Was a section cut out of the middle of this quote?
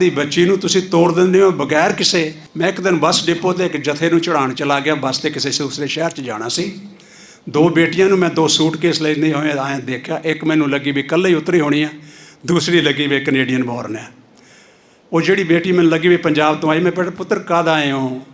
yes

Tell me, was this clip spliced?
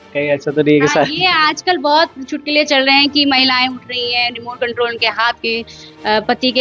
no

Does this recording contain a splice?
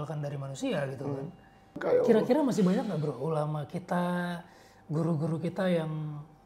yes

